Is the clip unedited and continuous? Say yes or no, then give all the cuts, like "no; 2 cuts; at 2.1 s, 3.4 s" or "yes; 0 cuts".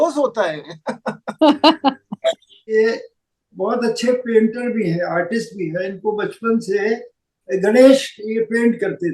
no; 1 cut; at 2.6 s